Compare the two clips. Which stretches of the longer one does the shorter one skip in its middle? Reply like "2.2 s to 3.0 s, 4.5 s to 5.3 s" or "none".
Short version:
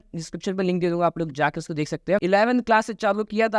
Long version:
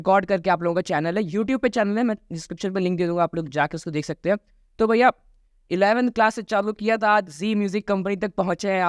4.4 s to 5.7 s